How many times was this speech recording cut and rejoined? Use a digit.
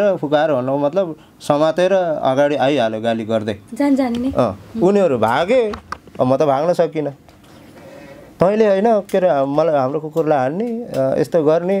0